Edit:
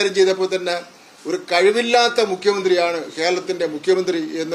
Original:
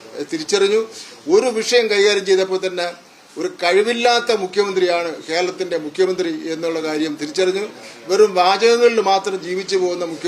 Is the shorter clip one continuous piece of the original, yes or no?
yes